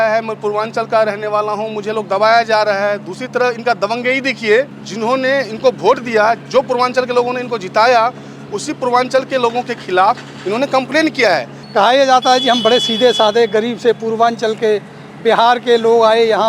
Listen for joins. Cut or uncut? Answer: cut